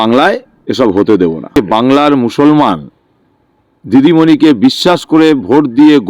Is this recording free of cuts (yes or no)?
no